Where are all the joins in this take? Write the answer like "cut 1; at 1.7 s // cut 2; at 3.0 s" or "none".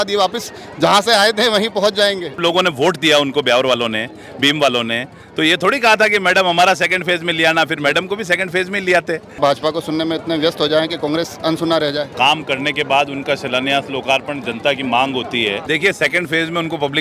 cut 1; at 2.4 s // cut 2; at 9.4 s // cut 3; at 12.1 s // cut 4; at 15.6 s